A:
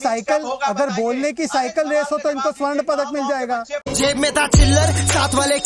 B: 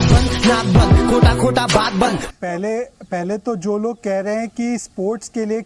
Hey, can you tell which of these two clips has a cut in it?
B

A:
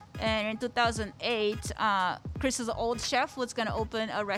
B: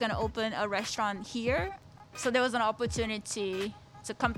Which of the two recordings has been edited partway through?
B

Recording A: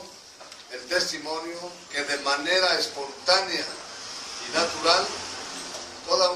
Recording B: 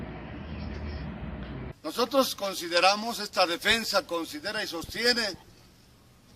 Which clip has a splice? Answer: B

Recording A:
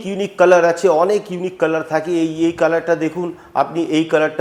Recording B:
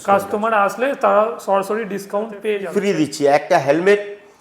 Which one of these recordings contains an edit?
B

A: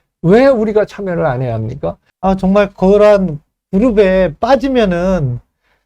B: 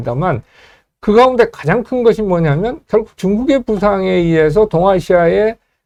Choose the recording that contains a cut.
A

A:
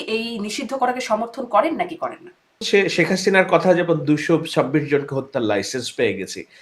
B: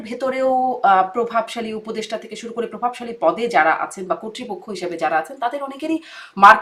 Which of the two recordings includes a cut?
A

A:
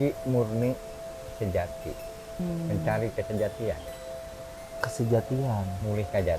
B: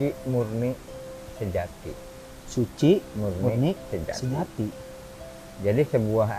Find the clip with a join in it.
A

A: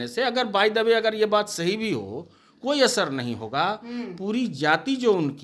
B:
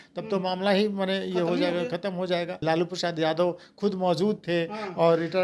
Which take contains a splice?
B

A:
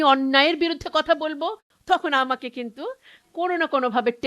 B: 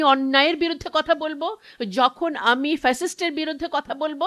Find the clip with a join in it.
A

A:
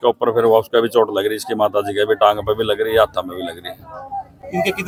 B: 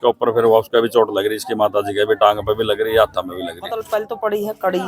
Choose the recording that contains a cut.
B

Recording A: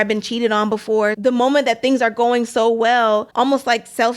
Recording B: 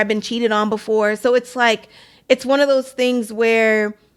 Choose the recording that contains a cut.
A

